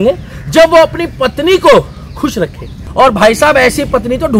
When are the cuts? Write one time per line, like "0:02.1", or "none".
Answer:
0:02.8